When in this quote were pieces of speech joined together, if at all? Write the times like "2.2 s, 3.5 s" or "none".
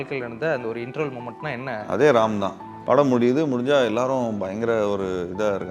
2.7 s